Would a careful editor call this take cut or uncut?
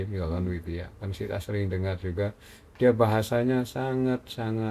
uncut